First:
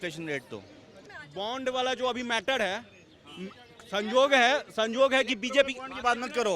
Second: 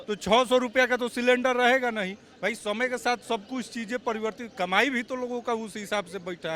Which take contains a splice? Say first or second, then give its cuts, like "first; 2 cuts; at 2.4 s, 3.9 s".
first; 1 cut; at 1.1 s